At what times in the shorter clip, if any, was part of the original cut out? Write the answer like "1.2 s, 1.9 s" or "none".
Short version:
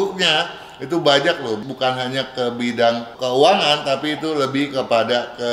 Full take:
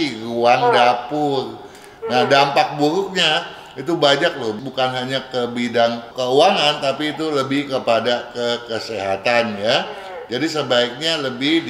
none